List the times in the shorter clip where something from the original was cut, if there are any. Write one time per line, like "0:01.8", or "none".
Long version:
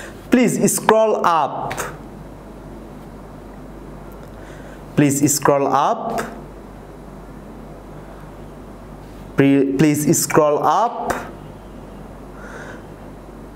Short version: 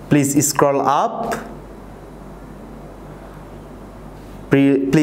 none